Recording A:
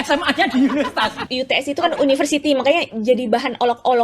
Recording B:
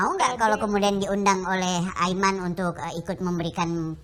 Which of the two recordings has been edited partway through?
A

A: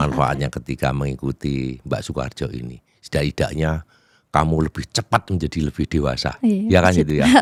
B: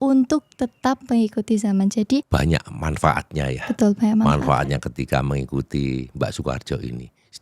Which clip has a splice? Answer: B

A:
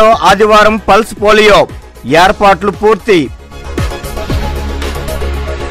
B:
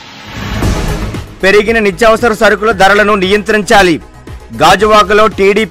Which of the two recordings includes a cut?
B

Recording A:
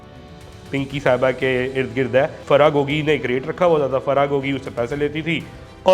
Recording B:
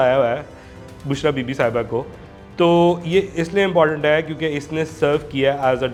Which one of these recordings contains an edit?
A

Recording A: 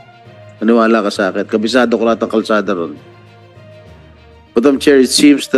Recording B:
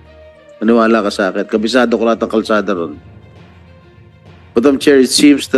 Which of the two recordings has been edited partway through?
B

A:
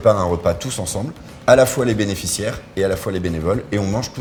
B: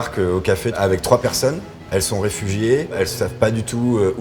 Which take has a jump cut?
B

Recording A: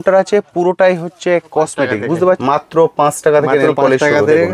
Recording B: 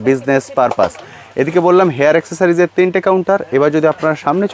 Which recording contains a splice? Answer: A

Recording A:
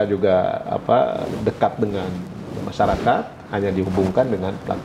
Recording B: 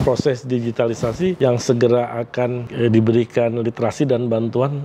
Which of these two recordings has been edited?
B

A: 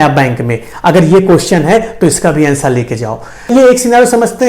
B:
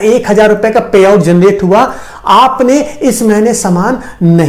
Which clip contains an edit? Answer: A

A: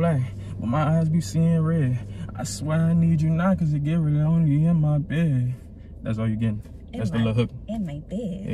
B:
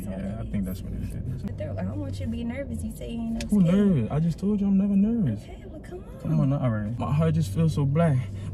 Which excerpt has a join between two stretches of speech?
B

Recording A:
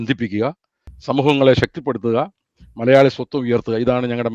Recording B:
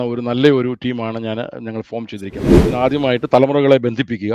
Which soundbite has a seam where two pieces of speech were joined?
B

